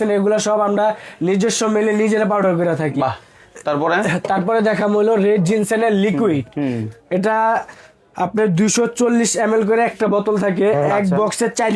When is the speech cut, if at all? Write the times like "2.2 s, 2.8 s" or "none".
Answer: none